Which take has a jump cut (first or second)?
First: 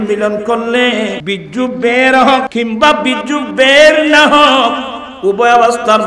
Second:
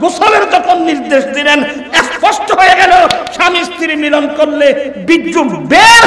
first